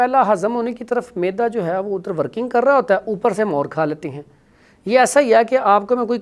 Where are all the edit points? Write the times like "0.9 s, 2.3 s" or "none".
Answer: none